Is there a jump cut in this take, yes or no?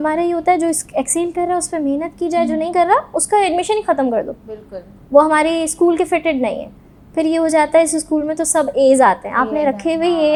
no